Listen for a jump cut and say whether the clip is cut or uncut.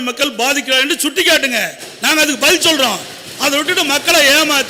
uncut